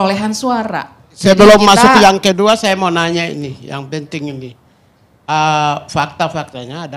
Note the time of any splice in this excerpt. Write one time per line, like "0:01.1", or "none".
0:01.2

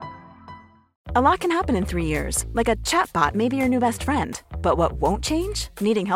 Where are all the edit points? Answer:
0:00.9

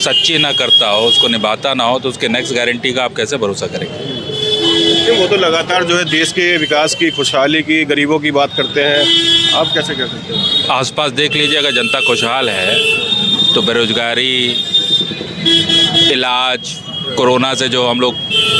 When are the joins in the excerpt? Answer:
none

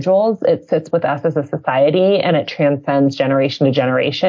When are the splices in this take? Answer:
none

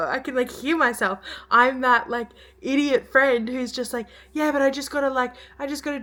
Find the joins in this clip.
none

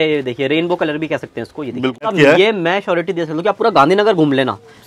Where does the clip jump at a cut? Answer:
0:02.1

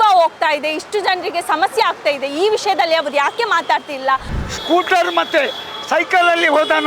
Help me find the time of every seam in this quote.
0:04.3

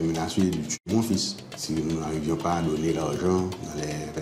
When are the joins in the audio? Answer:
0:01.6

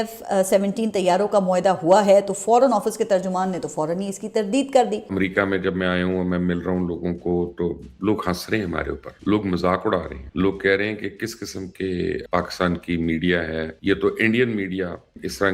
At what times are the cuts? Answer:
0:05.1
0:09.0
0:10.2
0:12.2
0:13.7

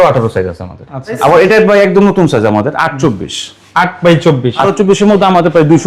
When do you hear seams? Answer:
0:01.2
0:04.7

